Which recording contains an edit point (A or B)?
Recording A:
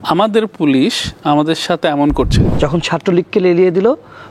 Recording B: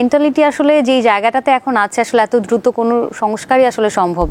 A